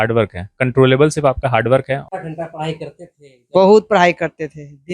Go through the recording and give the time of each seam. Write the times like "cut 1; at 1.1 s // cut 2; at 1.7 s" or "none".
cut 1; at 2.1 s